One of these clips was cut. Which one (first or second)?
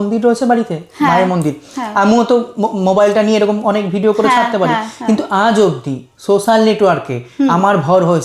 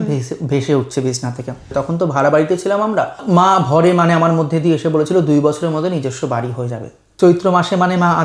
second